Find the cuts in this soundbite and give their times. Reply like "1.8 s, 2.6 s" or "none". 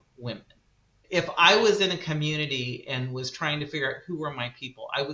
0.9 s